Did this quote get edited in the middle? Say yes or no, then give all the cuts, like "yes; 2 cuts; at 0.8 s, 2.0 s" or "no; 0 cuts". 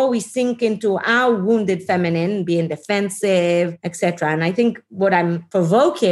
yes; 2 cuts; at 3.8 s, 5.2 s